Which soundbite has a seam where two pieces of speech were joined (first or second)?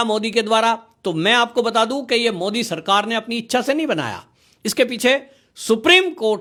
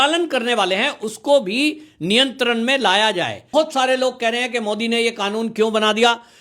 second